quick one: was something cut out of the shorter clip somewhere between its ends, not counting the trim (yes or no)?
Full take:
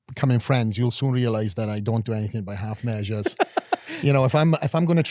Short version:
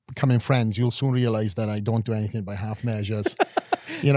no